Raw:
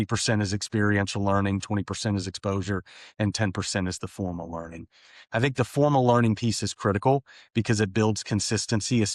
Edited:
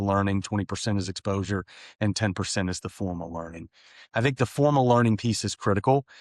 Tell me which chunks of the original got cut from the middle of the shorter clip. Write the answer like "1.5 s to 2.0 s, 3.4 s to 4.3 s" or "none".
none